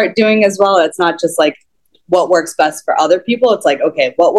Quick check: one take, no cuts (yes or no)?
yes